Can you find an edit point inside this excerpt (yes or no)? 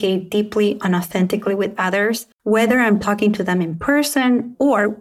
yes